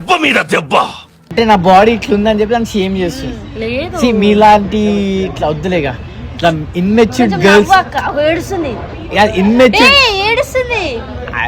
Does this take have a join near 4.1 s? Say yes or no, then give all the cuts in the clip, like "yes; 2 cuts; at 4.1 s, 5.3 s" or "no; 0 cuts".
no; 1 cut; at 1.2 s